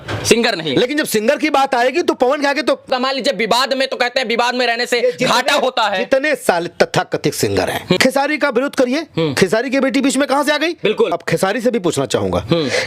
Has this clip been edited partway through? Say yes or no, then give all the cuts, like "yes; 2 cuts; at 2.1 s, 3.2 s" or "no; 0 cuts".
yes; 3 cuts; at 2.9 s, 8.0 s, 11.1 s